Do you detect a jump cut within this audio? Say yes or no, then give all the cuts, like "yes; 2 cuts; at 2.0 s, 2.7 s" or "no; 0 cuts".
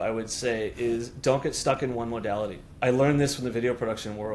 yes; 1 cut; at 2.6 s